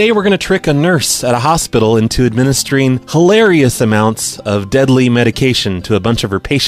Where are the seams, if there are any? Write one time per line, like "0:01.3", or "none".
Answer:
0:02.0